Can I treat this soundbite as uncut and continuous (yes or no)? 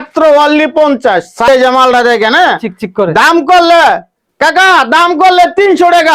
no